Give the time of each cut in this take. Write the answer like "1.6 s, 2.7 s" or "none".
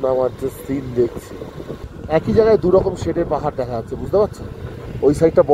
1.9 s